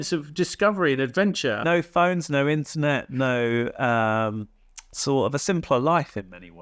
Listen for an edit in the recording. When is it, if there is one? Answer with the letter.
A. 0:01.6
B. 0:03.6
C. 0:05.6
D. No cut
A